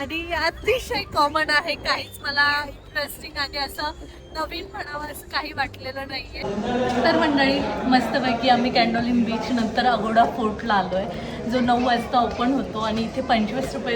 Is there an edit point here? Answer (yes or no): yes